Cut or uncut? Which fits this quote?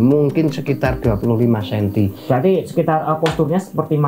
uncut